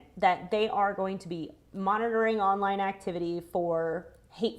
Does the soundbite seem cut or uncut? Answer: uncut